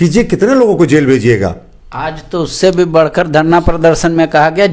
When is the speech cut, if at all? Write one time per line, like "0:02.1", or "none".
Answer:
none